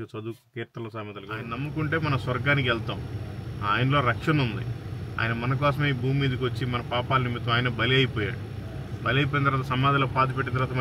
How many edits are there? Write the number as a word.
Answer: one